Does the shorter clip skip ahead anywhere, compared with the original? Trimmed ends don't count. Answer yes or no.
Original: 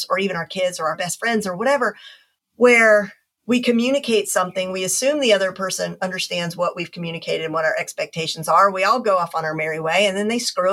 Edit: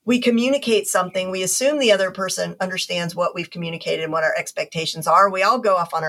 no